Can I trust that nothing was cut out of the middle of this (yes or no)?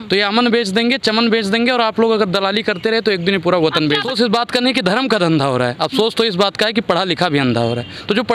no